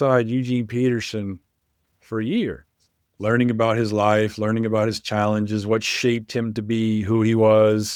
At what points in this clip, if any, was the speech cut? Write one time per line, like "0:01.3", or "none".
none